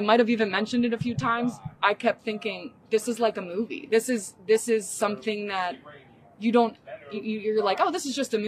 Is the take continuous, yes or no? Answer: yes